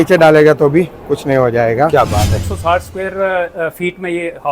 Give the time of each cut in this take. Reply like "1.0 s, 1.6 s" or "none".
2.4 s